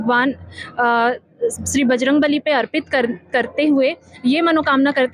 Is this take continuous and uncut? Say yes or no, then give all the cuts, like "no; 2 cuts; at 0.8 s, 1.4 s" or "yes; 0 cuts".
yes; 0 cuts